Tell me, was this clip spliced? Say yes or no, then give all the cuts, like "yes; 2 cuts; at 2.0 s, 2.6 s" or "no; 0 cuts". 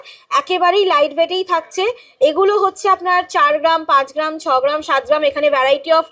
no; 0 cuts